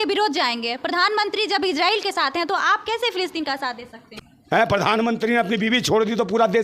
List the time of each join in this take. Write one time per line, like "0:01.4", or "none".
0:04.3